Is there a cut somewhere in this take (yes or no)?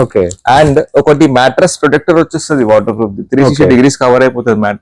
no